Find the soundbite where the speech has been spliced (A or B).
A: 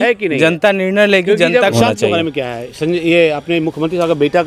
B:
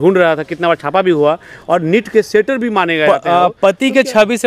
A